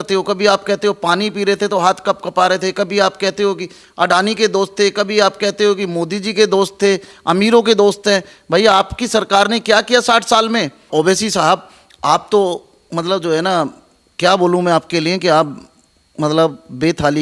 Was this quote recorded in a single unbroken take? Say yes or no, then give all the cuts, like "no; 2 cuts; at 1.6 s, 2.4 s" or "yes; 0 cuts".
no; 1 cut; at 10.9 s